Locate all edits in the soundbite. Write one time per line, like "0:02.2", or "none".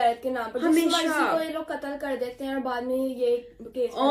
none